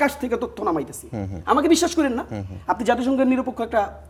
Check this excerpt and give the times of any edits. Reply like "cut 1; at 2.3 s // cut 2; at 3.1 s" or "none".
none